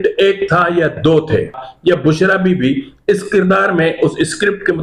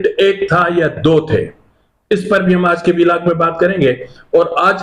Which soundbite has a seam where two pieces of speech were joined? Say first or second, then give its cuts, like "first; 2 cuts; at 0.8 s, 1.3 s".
first; 1 cut; at 1.6 s